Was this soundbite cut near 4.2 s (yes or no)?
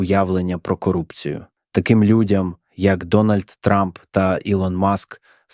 no